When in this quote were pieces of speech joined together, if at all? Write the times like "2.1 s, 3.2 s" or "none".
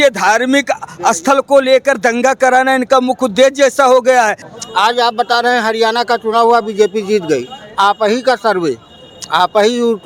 4.5 s